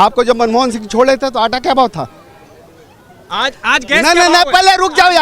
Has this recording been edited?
no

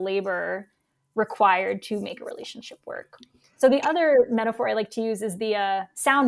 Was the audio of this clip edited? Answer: no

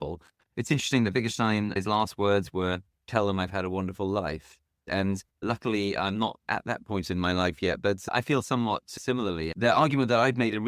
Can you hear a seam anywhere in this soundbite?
yes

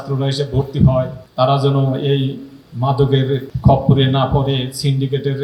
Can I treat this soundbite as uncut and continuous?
yes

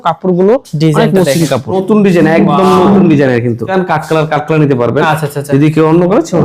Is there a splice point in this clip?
yes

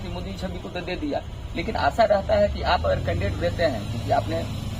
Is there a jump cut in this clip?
no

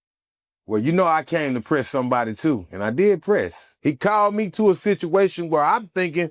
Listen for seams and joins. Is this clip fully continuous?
no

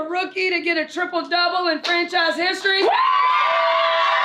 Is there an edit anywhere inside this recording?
no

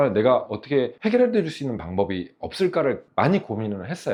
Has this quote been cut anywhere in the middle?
no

